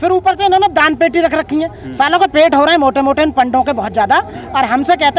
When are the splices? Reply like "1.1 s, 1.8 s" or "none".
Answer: none